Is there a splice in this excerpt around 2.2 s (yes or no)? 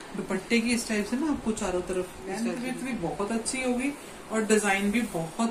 yes